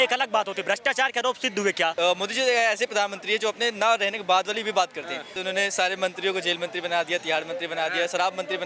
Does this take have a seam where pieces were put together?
yes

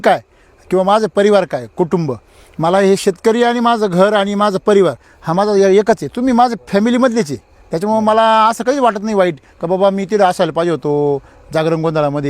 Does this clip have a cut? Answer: no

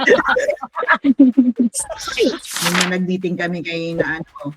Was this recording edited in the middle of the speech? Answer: yes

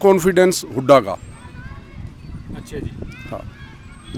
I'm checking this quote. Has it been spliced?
no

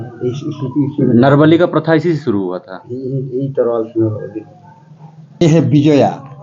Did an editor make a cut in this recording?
yes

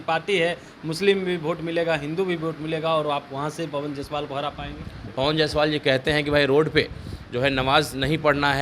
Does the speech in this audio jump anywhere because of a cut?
yes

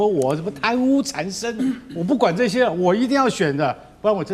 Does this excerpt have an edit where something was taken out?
no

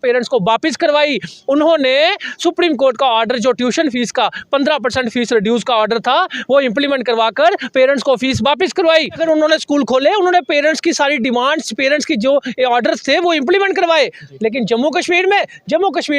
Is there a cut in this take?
yes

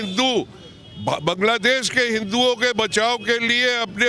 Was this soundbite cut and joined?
no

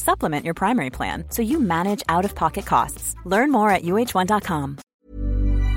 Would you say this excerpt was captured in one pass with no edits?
no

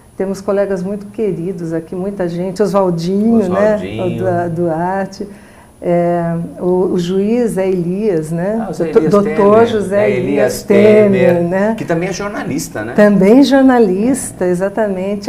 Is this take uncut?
no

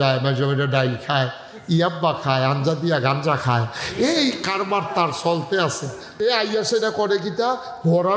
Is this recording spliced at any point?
yes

